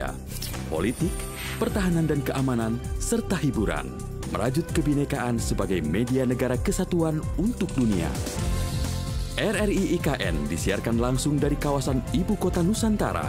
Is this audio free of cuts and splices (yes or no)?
yes